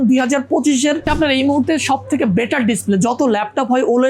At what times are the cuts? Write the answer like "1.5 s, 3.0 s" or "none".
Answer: 1.1 s